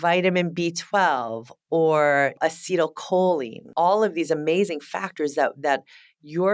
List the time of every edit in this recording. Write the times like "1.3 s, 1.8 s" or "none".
2.4 s, 3.7 s